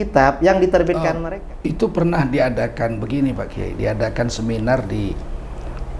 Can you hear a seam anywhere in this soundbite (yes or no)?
yes